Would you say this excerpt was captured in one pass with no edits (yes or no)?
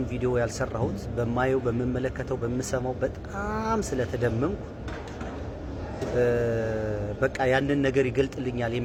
yes